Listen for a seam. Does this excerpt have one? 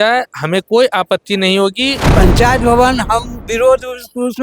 yes; 1 cut; at 2.1 s

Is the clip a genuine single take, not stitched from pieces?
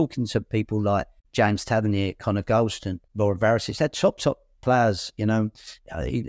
no; 2 cuts; at 1.2 s, 3.0 s

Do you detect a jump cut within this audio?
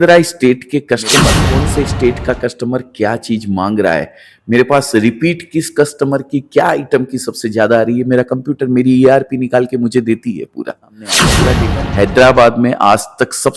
yes; 2 cuts; at 1.4 s, 11.3 s

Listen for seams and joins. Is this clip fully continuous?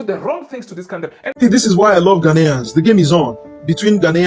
no; 1 cut; at 1.2 s

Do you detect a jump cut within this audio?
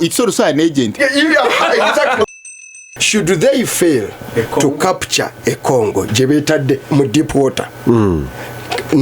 yes; 1 cut; at 2.3 s

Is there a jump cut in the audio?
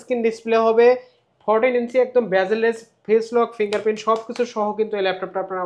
no; 0 cuts

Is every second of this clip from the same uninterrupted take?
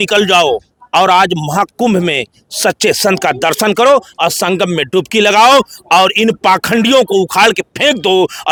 yes; 0 cuts

